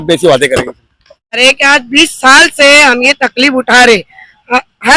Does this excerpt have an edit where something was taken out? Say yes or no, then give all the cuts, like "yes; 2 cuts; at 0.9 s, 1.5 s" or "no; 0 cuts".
yes; 1 cut; at 1.4 s